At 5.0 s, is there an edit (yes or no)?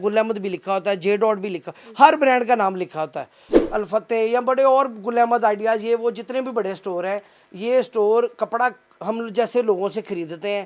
no